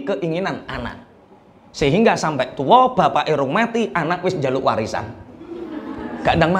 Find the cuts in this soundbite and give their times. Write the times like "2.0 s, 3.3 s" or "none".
none